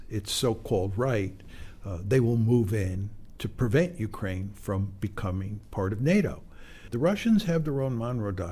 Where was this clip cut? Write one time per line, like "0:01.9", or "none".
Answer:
0:06.8